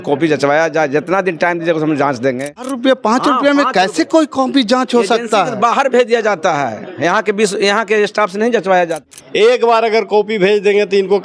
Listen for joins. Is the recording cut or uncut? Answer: cut